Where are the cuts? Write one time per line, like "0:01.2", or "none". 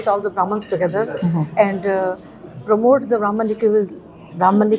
none